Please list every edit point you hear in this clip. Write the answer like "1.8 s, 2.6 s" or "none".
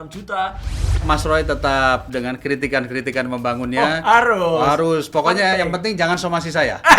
1.0 s